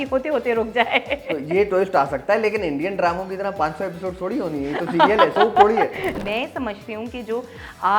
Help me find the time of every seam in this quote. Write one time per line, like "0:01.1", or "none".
0:06.2

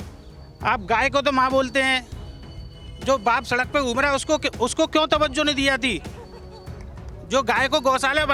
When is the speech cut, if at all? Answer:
none

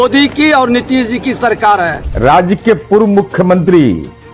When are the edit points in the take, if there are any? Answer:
0:01.9

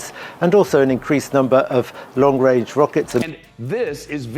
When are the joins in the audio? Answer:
0:03.3

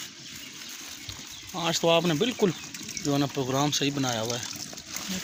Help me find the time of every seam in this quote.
none

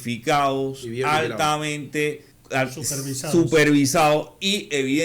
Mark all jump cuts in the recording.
0:02.3

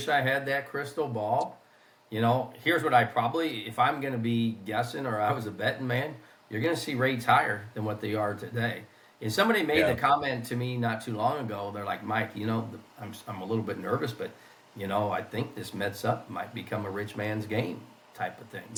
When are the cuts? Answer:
none

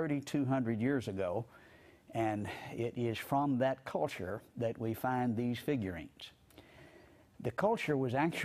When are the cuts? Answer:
0:01.9

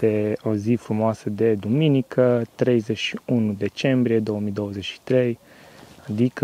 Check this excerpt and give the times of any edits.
none

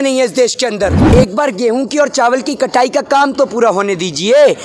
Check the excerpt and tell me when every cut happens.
0:01.0

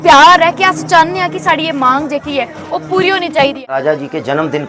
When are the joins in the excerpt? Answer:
0:03.7

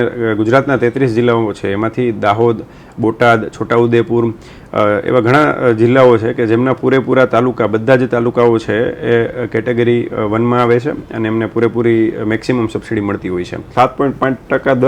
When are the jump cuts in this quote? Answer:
0:13.7

